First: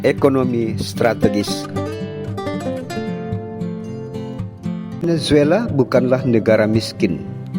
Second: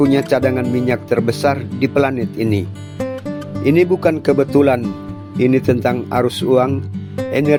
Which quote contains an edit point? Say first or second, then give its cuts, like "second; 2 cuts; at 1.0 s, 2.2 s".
first; 1 cut; at 5.0 s